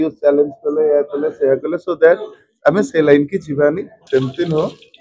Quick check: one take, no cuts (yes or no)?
no